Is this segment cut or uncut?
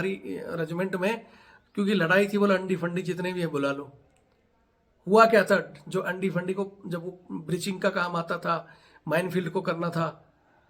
uncut